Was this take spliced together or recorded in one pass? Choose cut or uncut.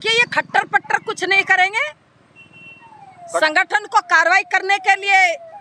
uncut